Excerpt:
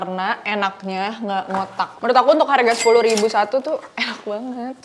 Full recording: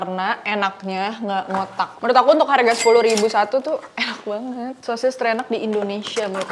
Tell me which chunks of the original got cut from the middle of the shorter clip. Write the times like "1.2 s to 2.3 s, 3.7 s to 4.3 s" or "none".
none